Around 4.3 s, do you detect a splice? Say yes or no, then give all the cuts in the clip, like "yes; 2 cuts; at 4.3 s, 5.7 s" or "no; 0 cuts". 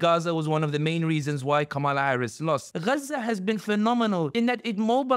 yes; 2 cuts; at 2.7 s, 4.3 s